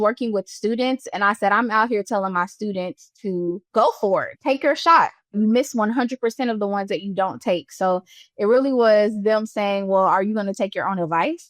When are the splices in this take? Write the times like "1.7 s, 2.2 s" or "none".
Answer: 5.4 s